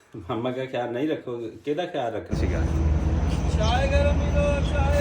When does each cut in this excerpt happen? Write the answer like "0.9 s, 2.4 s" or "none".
2.3 s